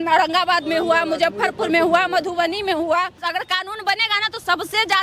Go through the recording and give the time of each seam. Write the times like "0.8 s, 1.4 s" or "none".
3.2 s